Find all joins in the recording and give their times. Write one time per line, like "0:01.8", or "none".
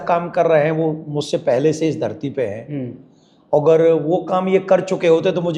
none